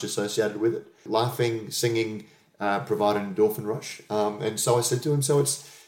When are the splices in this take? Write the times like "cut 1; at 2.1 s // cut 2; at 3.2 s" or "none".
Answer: cut 1; at 1.0 s

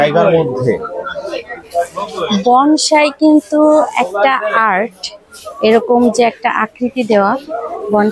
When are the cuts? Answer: none

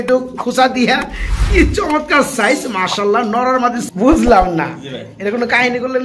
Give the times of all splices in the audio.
cut 1; at 3.8 s

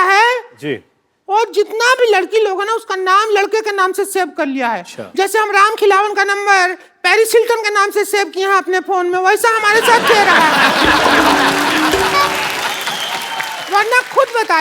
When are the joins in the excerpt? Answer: none

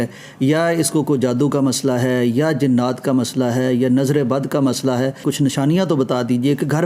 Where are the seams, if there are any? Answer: cut 1; at 5.2 s

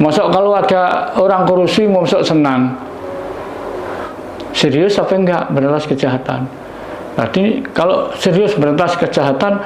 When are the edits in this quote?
cut 1; at 4.1 s

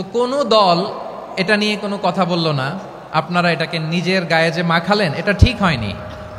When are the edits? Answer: none

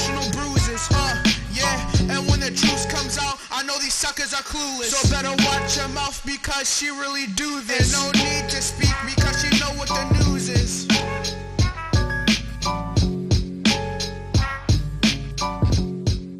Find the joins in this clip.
cut 1; at 13.5 s

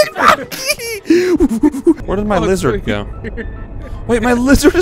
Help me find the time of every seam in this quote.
cut 1; at 2.0 s

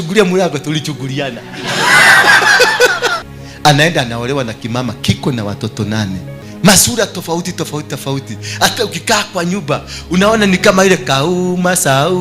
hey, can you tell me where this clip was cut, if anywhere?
cut 1; at 3.2 s // cut 2; at 6.4 s

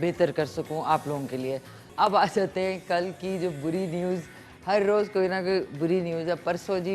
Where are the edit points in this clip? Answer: cut 1; at 1.8 s

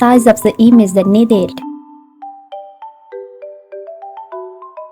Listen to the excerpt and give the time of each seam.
cut 1; at 1.5 s

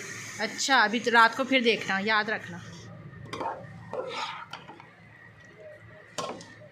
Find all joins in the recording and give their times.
cut 1; at 2.5 s

